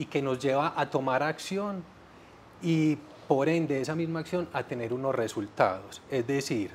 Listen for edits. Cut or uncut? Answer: uncut